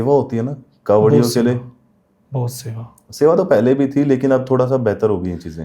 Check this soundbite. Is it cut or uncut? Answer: uncut